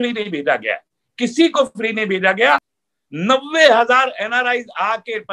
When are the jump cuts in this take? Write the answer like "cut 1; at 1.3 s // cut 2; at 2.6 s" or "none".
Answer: cut 1; at 2.7 s